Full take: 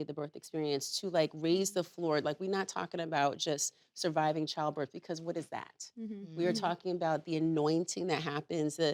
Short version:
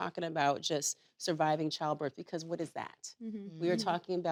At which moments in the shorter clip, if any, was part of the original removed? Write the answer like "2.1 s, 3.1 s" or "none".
none